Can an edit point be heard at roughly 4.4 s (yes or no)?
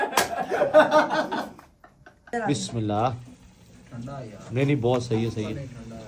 no